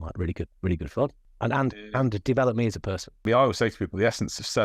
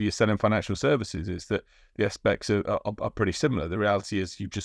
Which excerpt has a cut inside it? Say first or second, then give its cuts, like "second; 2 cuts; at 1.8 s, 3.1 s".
first; 2 cuts; at 1.2 s, 3.2 s